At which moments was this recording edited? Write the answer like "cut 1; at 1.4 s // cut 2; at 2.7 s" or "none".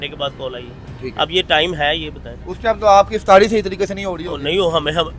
none

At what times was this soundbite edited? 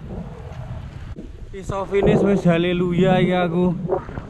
cut 1; at 1.1 s

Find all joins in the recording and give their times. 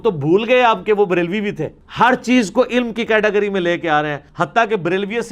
cut 1; at 4.2 s

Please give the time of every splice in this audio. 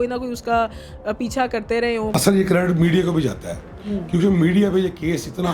cut 1; at 2.1 s

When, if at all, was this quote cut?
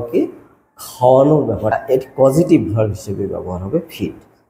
cut 1; at 1.7 s

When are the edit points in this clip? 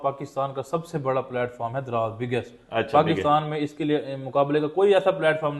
none

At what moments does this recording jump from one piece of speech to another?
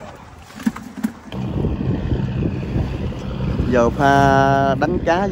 cut 1; at 1.2 s

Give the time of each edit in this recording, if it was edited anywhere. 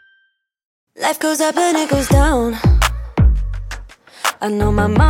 cut 1; at 1.0 s

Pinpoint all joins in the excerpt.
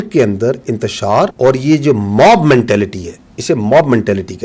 cut 1; at 1.3 s

